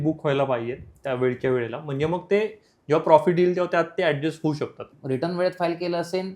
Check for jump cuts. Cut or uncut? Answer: cut